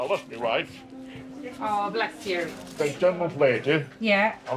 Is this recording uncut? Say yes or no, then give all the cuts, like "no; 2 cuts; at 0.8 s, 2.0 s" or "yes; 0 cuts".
yes; 0 cuts